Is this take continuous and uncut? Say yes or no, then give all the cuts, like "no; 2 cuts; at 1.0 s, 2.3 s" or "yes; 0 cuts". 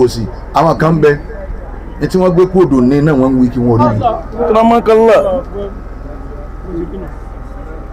yes; 0 cuts